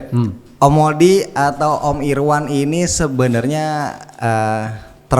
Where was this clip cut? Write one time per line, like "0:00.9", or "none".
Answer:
none